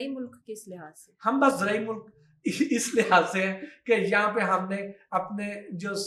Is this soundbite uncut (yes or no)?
yes